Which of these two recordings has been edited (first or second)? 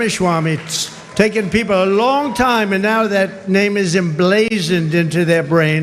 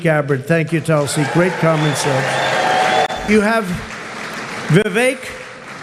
second